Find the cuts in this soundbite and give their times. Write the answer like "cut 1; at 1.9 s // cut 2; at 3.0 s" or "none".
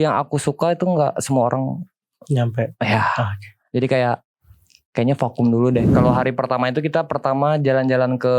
cut 1; at 5.9 s

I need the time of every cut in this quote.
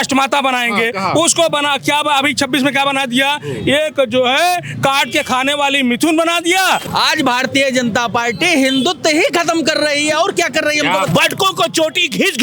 cut 1; at 6.8 s // cut 2; at 11.1 s

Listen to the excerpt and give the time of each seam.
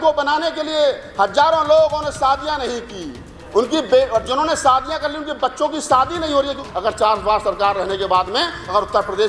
cut 1; at 6.6 s

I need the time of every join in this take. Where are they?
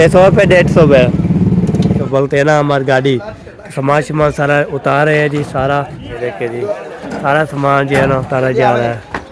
cut 1; at 2.0 s // cut 2; at 6.1 s

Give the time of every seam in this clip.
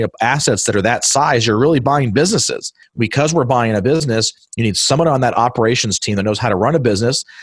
cut 1; at 2.8 s // cut 2; at 4.0 s

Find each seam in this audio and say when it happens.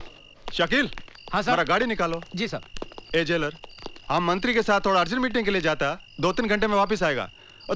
none

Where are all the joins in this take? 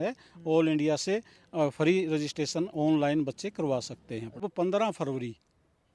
cut 1; at 4.5 s

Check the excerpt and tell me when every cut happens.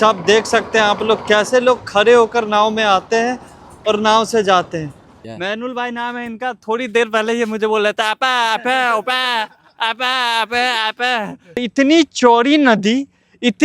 cut 1; at 5.1 s // cut 2; at 11.6 s

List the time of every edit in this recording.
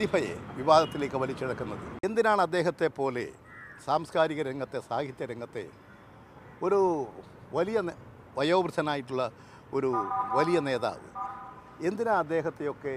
cut 1; at 1.9 s

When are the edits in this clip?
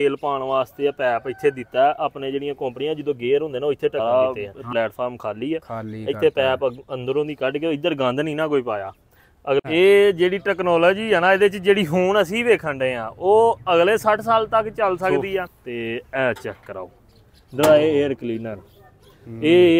cut 1; at 4.0 s // cut 2; at 9.6 s // cut 3; at 15.6 s

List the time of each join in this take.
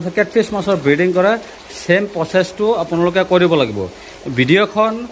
none

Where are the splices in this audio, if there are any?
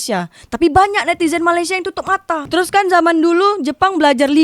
cut 1; at 2.4 s

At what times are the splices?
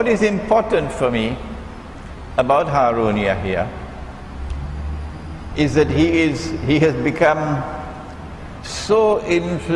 cut 1; at 2.6 s

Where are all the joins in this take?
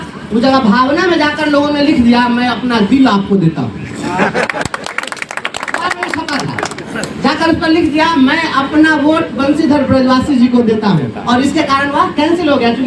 none

